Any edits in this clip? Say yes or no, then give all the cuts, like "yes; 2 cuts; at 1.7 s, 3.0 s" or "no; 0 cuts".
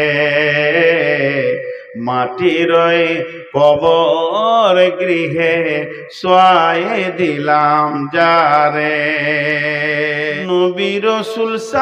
yes; 1 cut; at 10.4 s